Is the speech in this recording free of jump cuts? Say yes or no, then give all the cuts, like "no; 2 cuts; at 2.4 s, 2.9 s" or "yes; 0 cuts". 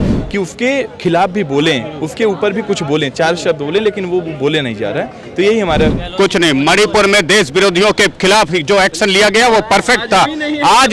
no; 1 cut; at 5.9 s